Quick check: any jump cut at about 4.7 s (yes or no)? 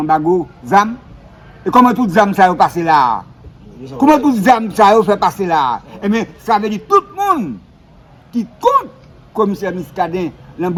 no